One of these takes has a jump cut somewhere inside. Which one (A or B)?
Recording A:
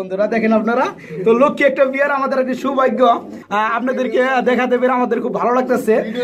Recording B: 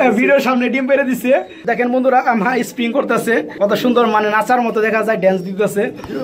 B